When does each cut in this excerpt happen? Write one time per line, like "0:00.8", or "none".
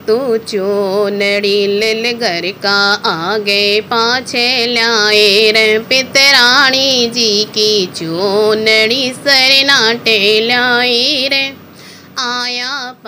none